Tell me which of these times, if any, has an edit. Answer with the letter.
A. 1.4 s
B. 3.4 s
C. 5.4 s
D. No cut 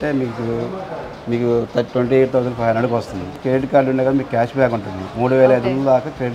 B